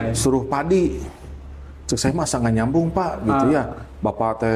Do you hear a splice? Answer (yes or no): no